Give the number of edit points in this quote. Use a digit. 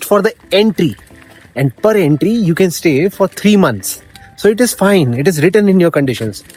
0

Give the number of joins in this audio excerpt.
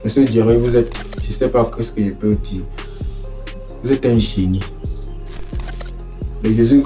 0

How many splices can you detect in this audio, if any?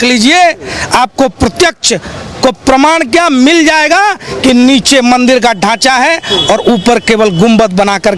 0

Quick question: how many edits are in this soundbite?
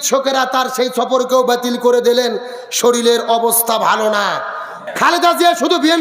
1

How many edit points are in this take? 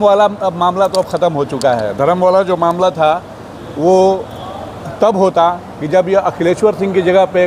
0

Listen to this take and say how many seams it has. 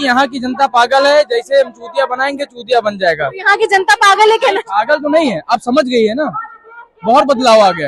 0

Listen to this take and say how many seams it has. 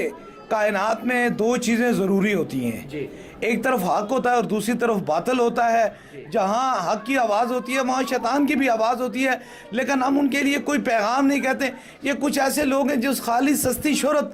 0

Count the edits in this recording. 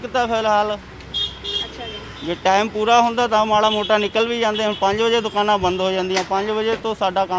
0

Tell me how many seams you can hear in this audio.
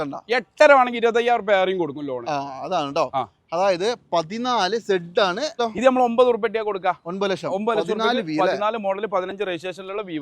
1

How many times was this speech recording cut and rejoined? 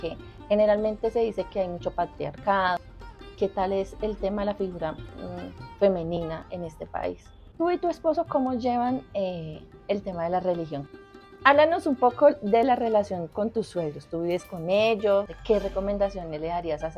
4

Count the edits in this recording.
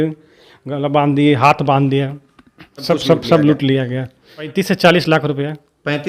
2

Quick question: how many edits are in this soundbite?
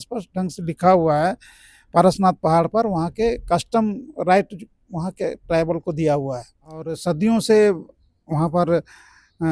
1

